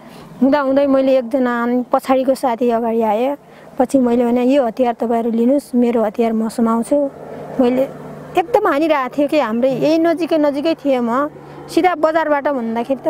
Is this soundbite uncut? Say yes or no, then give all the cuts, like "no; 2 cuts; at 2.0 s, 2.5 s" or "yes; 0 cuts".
yes; 0 cuts